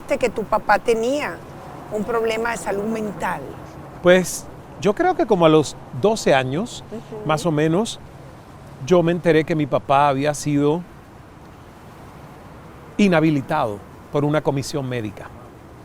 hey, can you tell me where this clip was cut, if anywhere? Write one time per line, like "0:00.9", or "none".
none